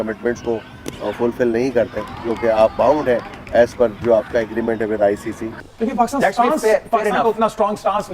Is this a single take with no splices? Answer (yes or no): no